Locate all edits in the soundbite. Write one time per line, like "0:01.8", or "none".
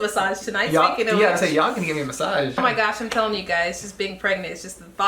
0:02.6